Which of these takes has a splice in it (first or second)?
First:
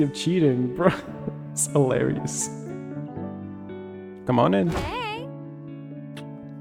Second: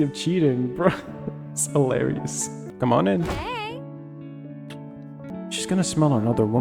second